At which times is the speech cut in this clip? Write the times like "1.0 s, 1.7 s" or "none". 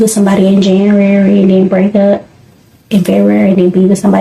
none